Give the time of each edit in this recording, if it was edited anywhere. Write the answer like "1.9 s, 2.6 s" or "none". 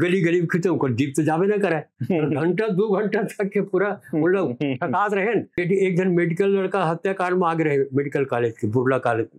5.6 s